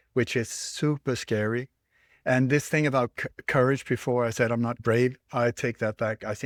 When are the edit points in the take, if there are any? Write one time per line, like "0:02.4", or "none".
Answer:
none